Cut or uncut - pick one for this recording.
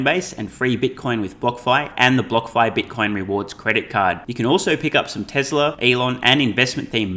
cut